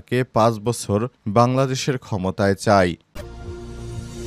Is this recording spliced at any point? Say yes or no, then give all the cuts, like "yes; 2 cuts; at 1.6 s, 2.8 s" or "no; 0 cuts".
yes; 1 cut; at 3.0 s